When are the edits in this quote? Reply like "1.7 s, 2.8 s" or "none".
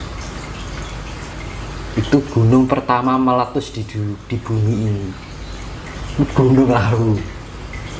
none

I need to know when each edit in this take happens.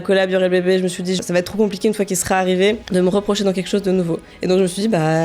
1.2 s, 2.8 s, 4.3 s

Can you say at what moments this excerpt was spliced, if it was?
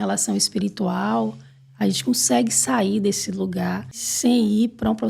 4.1 s

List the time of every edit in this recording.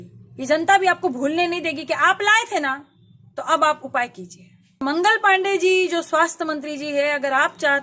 4.8 s

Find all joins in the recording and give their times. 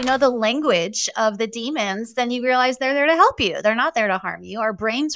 none

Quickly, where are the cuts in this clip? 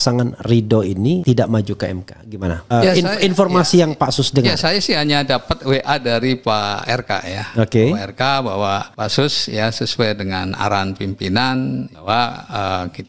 1.2 s, 2.6 s, 8.9 s, 11.9 s

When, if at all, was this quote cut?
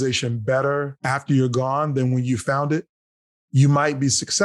1.0 s

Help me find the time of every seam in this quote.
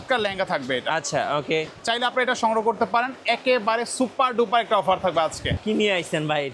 5.6 s

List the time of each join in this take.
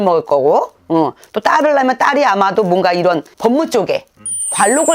none

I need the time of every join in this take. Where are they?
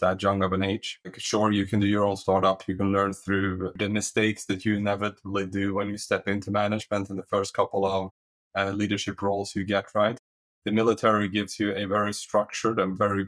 1.2 s, 3.8 s

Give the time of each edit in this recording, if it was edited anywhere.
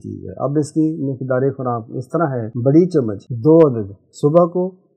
2.5 s, 3.2 s

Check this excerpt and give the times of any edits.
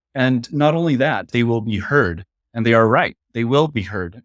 1.3 s

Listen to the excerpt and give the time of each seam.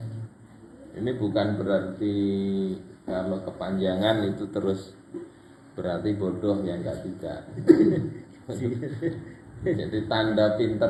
none

